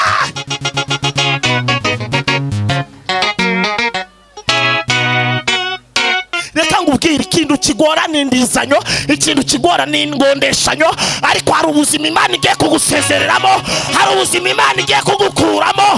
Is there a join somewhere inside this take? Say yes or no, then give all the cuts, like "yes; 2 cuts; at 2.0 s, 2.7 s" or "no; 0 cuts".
yes; 1 cut; at 6.4 s